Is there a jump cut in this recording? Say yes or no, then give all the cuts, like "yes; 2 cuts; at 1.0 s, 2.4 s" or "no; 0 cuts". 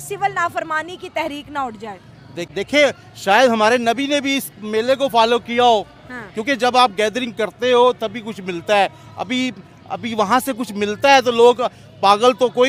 no; 0 cuts